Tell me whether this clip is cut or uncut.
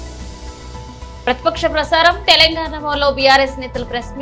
cut